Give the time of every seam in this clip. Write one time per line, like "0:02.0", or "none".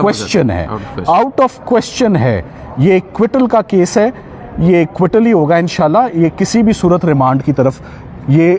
none